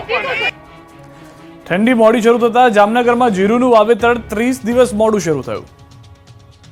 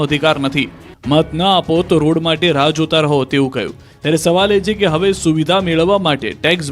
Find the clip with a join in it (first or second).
second